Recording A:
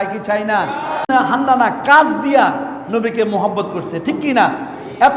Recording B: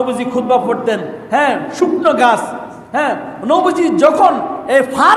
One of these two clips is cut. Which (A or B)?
A